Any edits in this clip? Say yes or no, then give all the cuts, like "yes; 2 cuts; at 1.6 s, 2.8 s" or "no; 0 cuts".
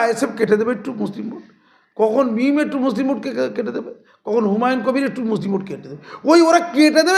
no; 0 cuts